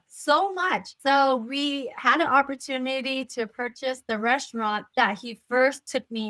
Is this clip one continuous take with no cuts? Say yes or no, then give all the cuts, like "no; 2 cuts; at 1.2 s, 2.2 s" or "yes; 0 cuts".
yes; 0 cuts